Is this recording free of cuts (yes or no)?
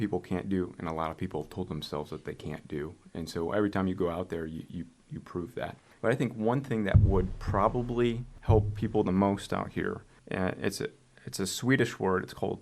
no